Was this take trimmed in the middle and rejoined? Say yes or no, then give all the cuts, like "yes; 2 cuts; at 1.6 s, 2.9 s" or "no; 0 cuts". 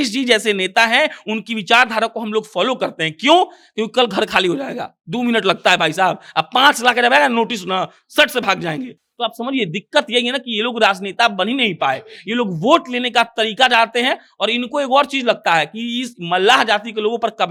no; 0 cuts